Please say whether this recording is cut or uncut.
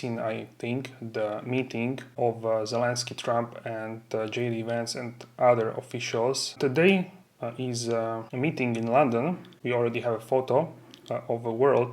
cut